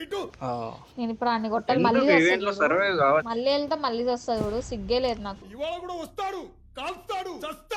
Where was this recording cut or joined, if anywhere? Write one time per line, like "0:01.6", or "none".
0:03.3
0:05.4

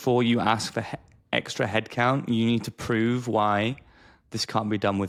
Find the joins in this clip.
none

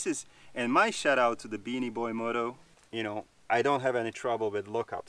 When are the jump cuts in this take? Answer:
0:02.7

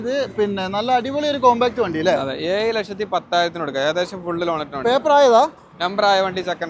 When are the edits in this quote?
none

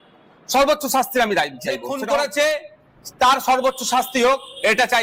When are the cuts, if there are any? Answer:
0:01.8

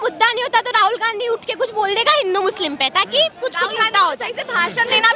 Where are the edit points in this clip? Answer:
none

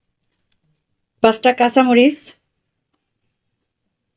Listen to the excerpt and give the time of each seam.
none

